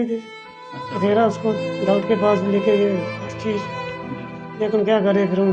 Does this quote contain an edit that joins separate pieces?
no; 0 cuts

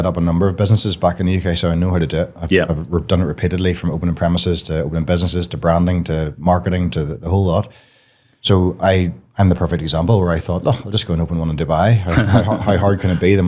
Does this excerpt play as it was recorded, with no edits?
yes; 0 cuts

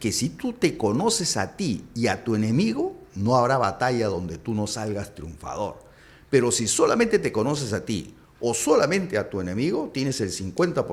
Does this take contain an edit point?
no; 0 cuts

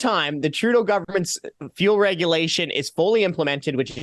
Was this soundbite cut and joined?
no; 0 cuts

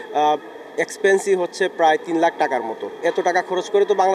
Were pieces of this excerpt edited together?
yes; 1 cut; at 3.0 s

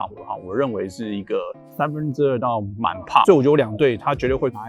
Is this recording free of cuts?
no; 1 cut; at 3.2 s

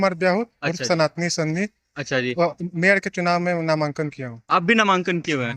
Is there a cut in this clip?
no; 0 cuts

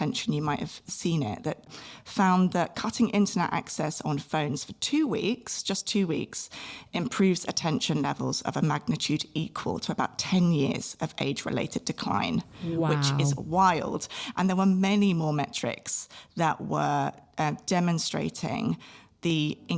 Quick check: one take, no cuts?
no; 1 cut; at 1.7 s

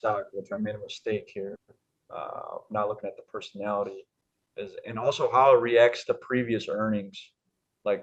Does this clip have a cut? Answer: no; 0 cuts

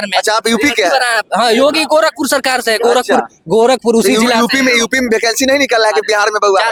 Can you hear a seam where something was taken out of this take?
no; 0 cuts

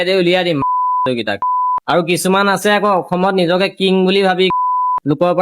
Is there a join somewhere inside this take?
yes; 1 cut; at 1.8 s

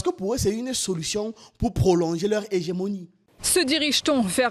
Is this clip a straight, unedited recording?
no; 1 cut; at 3.1 s

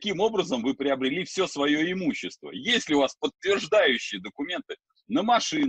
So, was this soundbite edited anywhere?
no; 0 cuts

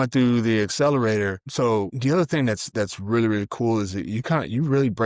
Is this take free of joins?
yes; 0 cuts

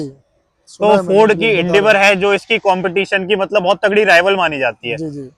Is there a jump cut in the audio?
no; 0 cuts

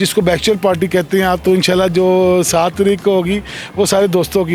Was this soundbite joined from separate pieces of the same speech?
no; 0 cuts

